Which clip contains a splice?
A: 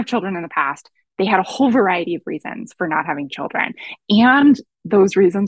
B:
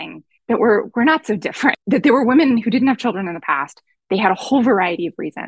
B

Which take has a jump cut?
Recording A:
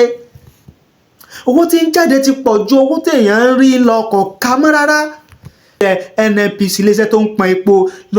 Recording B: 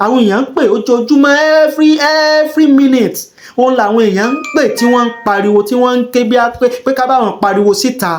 A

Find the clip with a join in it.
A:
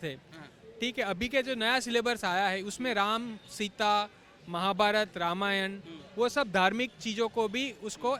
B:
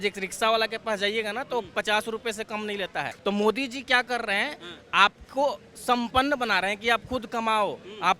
B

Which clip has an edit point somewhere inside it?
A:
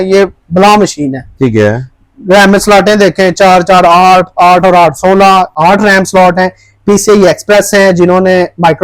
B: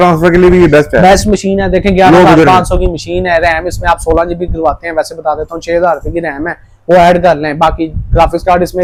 A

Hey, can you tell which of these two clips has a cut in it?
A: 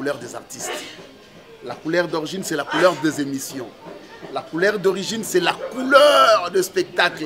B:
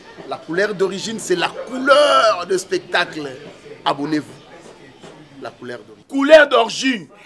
B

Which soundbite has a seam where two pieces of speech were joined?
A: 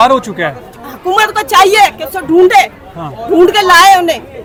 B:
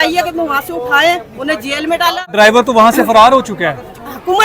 B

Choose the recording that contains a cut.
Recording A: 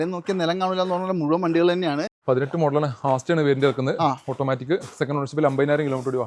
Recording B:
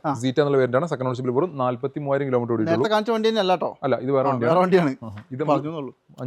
A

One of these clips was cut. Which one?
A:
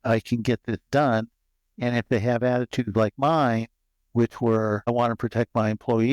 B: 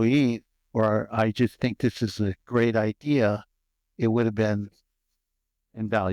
A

